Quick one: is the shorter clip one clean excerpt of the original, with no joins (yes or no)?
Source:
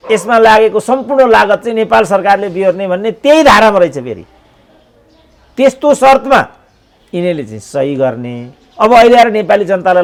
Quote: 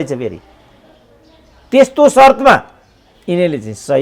yes